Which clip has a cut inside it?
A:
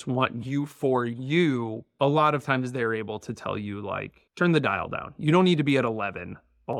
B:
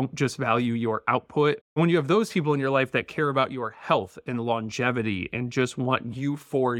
B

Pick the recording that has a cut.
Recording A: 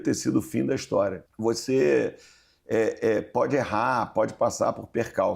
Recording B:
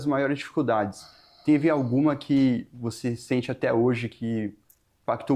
A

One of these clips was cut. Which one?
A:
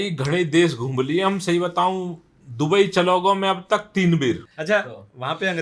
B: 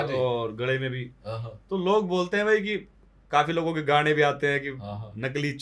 A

